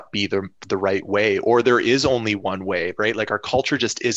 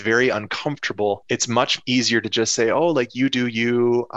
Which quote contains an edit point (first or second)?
second